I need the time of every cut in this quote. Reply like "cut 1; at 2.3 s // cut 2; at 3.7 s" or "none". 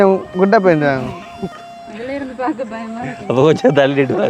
none

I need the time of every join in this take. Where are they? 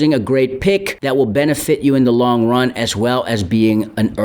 cut 1; at 0.9 s

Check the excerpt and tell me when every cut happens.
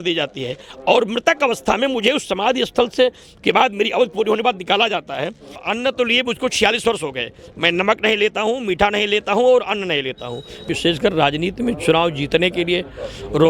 cut 1; at 5.6 s // cut 2; at 10.7 s

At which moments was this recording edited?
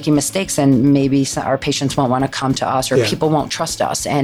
cut 1; at 3.0 s

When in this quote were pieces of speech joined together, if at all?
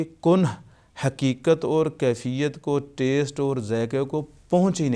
none

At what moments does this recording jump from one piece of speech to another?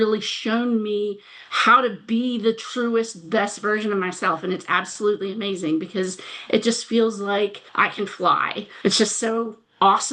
cut 1; at 8.8 s

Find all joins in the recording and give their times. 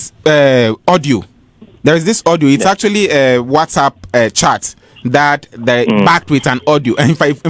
none

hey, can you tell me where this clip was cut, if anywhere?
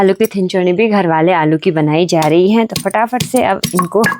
none

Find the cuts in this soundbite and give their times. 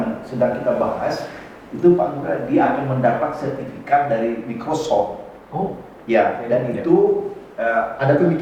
none

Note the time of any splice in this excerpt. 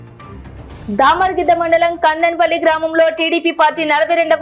none

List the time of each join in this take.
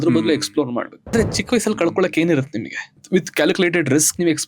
cut 1; at 1.1 s // cut 2; at 3.0 s

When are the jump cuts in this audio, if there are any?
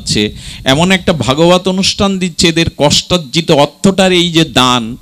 none

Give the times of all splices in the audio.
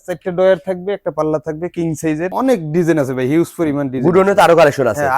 cut 1; at 2.3 s

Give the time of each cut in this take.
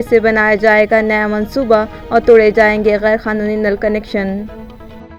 none

